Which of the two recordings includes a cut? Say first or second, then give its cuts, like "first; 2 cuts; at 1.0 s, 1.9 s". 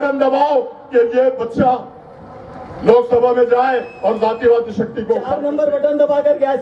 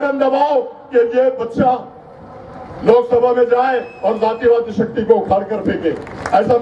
first; 1 cut; at 5.4 s